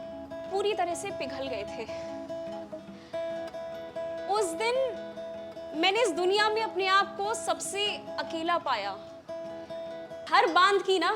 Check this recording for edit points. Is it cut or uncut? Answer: cut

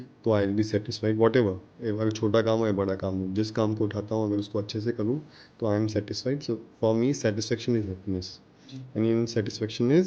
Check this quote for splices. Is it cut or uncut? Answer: uncut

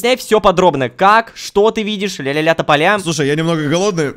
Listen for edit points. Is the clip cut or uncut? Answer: cut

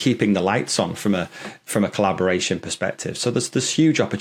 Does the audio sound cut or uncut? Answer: uncut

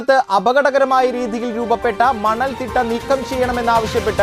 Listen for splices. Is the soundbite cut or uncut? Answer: uncut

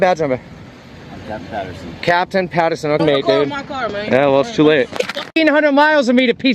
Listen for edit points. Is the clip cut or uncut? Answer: cut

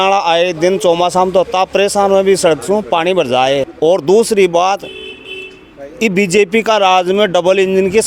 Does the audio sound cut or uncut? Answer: uncut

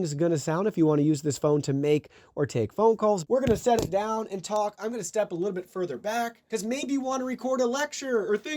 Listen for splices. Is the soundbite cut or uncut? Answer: cut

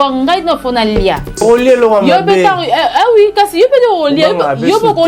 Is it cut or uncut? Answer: cut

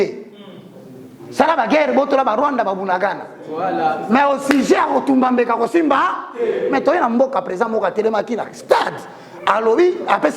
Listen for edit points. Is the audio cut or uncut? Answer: uncut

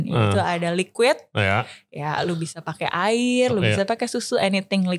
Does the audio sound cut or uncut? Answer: uncut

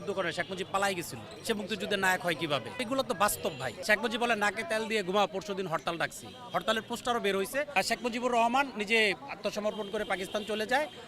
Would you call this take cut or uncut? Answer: cut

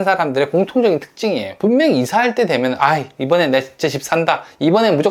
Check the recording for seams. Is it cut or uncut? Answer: cut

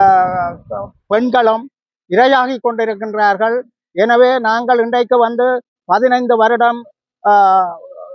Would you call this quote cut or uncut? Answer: uncut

